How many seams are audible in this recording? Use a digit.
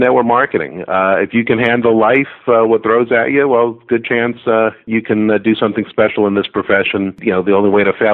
2